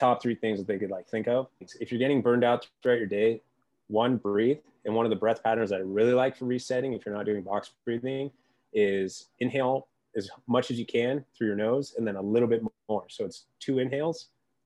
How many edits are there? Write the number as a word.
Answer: one